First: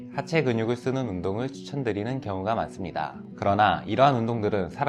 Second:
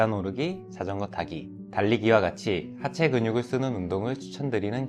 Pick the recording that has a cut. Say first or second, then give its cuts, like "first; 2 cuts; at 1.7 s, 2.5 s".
first; 1 cut; at 3.2 s